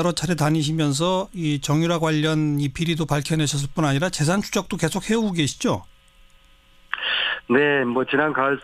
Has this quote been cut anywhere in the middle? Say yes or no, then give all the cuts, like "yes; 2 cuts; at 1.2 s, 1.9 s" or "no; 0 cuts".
no; 0 cuts